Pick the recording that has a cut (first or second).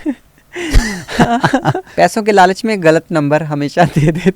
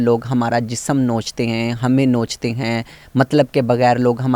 first